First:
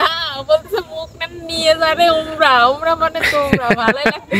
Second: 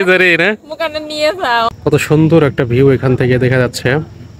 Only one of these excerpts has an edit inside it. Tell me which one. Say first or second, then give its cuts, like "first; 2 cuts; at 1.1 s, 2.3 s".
second; 1 cut; at 1.7 s